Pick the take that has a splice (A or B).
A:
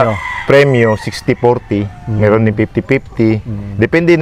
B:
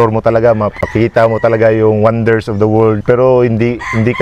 B